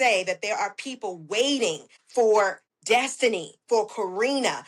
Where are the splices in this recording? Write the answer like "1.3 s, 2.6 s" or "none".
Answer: 1.9 s, 2.7 s